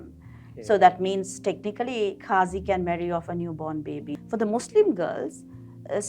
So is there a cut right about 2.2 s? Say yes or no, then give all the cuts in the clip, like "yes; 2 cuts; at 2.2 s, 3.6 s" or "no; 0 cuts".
no; 1 cut; at 4.1 s